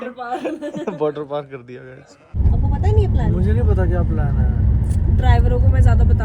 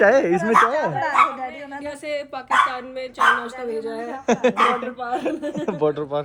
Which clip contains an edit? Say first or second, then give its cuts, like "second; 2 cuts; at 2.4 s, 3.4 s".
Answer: first; 1 cut; at 2.4 s